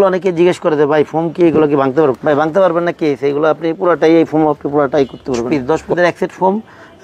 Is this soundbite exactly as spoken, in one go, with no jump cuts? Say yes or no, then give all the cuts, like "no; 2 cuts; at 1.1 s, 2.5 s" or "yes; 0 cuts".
no; 2 cuts; at 2.2 s, 5.5 s